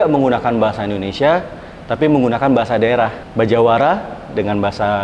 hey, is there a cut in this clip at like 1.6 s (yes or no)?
no